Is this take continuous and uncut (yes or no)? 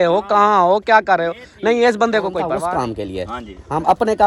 no